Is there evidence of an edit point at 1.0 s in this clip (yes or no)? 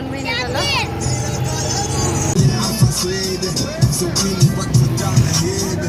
no